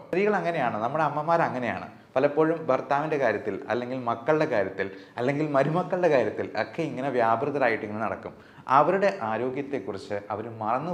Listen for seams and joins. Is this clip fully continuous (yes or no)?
yes